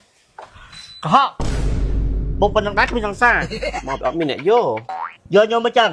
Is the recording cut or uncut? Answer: cut